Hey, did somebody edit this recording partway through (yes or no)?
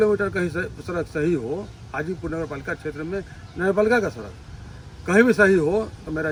no